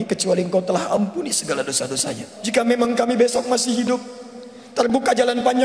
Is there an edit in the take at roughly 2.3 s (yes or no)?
yes